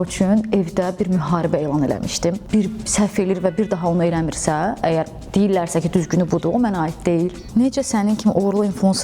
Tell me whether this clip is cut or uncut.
cut